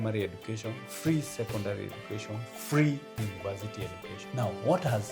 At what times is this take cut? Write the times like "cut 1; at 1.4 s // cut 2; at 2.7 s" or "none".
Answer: cut 1; at 4.1 s